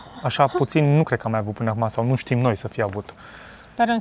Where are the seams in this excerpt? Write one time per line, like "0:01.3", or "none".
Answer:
none